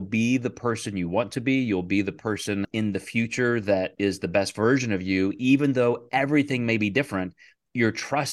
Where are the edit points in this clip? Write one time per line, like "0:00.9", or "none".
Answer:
0:02.7